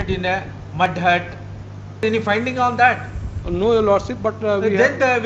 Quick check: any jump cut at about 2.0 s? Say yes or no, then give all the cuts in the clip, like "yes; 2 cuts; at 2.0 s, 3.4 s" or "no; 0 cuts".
yes; 1 cut; at 2.0 s